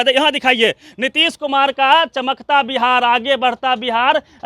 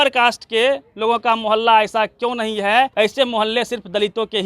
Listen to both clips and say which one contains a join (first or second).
second